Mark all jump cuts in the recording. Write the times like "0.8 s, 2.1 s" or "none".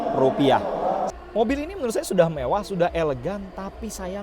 1.1 s